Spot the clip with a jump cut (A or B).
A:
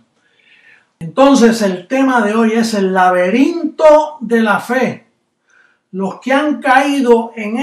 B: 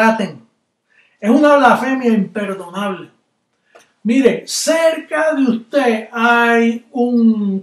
B